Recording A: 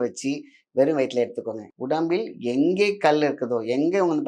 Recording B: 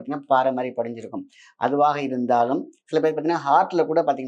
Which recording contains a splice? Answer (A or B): A